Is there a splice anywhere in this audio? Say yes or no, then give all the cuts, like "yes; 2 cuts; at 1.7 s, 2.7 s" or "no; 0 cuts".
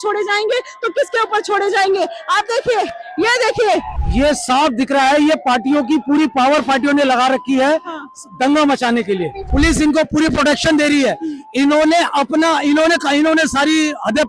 yes; 2 cuts; at 4.0 s, 9.4 s